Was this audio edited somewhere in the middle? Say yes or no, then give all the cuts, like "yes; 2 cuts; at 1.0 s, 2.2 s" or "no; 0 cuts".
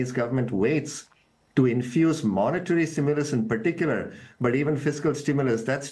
no; 0 cuts